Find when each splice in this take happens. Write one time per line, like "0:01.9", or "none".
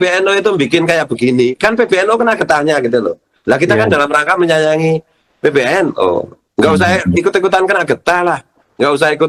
none